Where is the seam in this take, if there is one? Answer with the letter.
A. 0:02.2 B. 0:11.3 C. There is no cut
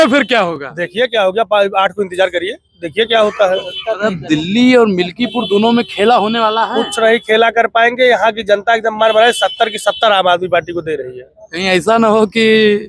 C